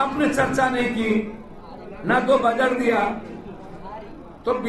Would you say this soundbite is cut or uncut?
uncut